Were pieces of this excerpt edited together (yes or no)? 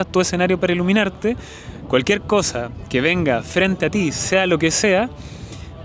no